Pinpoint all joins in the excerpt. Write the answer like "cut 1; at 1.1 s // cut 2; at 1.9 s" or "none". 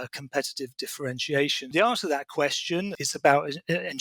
cut 1; at 1.7 s // cut 2; at 2.9 s